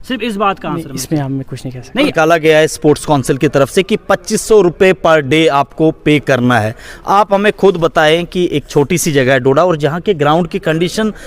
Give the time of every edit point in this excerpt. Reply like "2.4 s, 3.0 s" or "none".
2.1 s